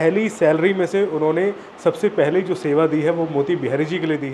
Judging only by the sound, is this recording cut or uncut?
uncut